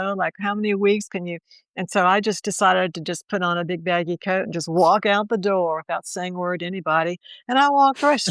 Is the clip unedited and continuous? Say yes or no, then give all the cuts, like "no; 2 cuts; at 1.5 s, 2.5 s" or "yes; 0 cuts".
yes; 0 cuts